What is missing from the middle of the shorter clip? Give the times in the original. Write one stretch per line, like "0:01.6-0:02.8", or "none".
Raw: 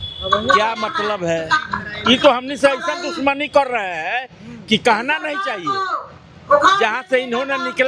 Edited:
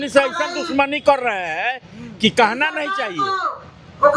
none